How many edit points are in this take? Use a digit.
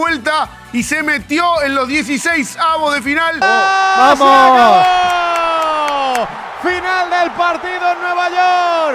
1